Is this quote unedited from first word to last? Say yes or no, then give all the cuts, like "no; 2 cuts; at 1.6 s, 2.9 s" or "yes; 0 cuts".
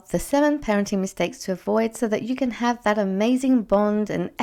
yes; 0 cuts